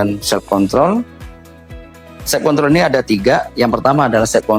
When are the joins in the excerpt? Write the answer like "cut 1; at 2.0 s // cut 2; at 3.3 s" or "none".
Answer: none

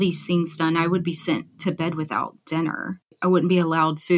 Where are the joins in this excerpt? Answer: cut 1; at 3.2 s

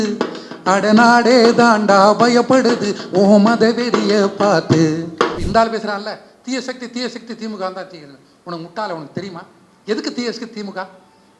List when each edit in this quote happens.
cut 1; at 5.4 s

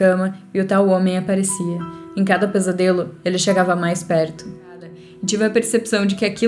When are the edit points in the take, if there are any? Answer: cut 1; at 4.7 s

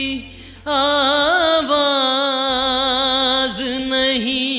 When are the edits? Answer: none

